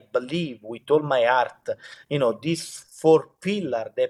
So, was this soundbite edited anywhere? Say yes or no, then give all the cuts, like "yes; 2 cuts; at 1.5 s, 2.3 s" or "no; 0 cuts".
no; 0 cuts